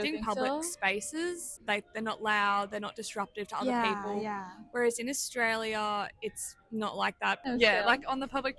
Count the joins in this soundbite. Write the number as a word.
two